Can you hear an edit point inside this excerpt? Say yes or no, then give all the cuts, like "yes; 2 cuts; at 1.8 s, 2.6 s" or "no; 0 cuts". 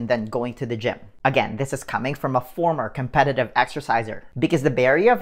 no; 0 cuts